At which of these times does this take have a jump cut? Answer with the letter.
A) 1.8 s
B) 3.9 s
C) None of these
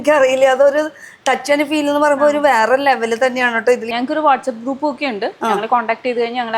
B